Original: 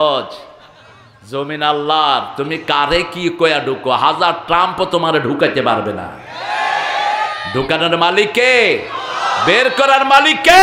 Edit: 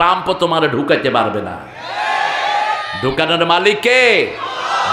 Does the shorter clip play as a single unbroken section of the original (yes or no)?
yes